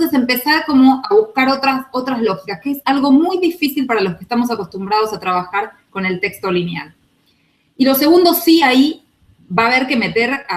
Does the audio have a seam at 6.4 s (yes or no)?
yes